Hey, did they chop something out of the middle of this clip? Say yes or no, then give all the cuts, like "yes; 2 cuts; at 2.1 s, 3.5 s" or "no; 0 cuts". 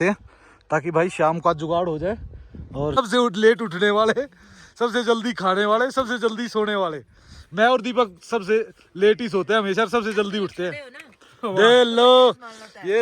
yes; 1 cut; at 3.0 s